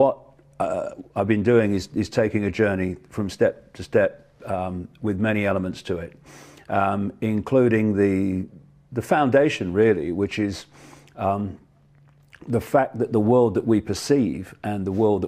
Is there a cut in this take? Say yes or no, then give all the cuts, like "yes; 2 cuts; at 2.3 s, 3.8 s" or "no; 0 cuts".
yes; 1 cut; at 13.9 s